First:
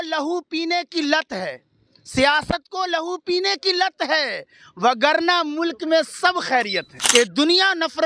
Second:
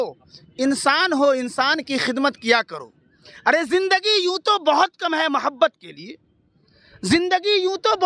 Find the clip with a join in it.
first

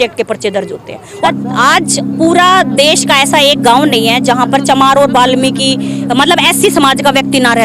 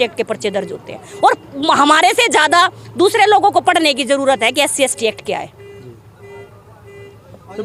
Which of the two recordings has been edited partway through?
first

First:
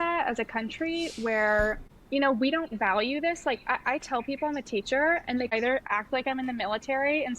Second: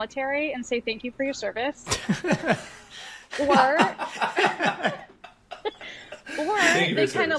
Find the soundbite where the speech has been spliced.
first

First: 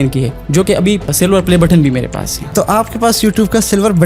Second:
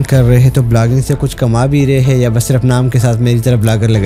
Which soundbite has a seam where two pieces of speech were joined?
first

